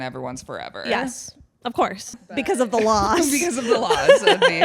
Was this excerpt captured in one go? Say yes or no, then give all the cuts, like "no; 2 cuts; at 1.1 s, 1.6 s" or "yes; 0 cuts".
no; 1 cut; at 2.4 s